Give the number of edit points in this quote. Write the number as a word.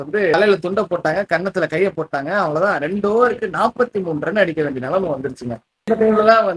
zero